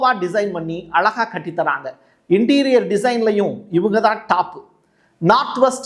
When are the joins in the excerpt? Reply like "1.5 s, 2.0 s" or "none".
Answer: none